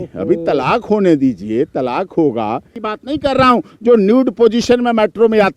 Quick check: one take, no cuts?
no; 1 cut; at 2.9 s

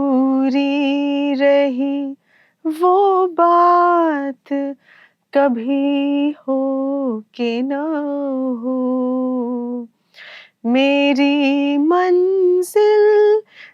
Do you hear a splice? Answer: no; 0 cuts

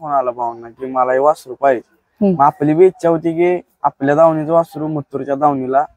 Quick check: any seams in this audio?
no; 0 cuts

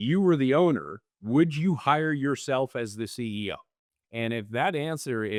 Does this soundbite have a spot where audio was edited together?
no; 0 cuts

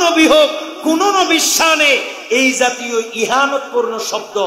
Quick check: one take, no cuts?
yes; 0 cuts

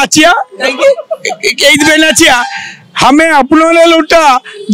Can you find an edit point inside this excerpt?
no; 0 cuts

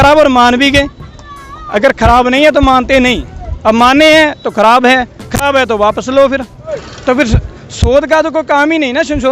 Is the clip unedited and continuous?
no; 1 cut; at 6.6 s

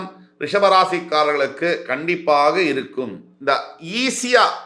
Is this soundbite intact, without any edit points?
no; 1 cut; at 3.2 s

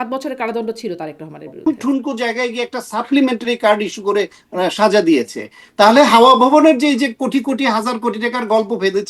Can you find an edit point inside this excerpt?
yes; 1 cut; at 1.7 s

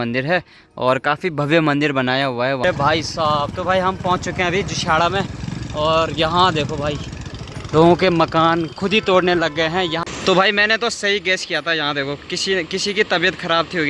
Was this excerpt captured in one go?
no; 2 cuts; at 2.6 s, 10.0 s

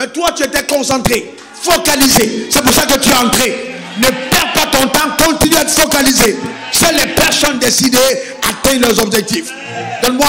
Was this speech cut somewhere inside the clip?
no; 0 cuts

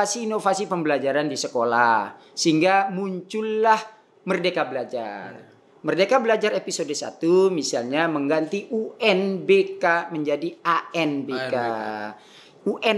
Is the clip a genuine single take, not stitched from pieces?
yes; 0 cuts

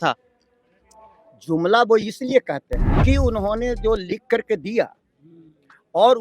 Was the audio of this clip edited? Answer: yes; 1 cut; at 3.0 s

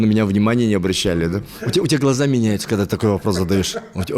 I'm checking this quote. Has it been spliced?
yes; 1 cut; at 1.5 s

